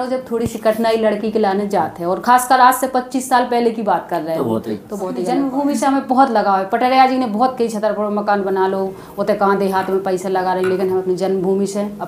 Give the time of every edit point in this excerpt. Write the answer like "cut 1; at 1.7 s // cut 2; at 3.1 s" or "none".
cut 1; at 5.5 s